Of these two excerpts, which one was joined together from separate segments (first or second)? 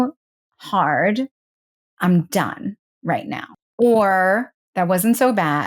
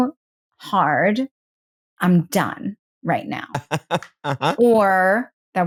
first